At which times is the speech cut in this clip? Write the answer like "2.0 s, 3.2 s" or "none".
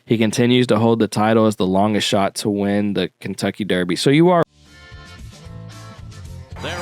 4.4 s